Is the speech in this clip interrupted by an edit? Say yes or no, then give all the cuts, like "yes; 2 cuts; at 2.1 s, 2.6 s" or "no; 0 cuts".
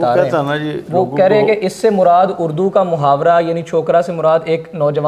no; 0 cuts